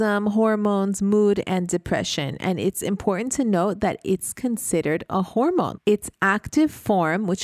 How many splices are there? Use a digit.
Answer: 1